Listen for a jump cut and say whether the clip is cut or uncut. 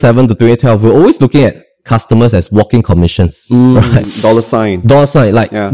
cut